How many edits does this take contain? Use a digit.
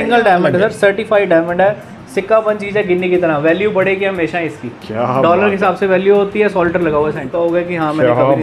0